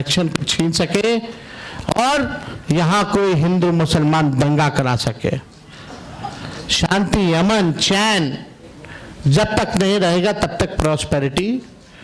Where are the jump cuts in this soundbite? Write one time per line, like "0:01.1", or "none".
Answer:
none